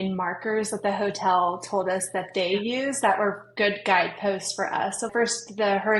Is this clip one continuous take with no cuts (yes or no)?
no